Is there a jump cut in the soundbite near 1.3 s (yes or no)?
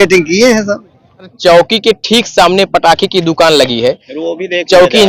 yes